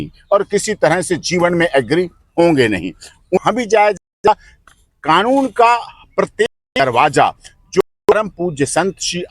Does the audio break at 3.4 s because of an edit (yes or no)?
yes